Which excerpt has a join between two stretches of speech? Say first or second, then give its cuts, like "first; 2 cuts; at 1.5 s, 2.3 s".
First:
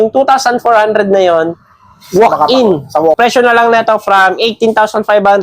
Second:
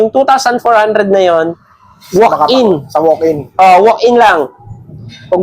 first; 1 cut; at 3.2 s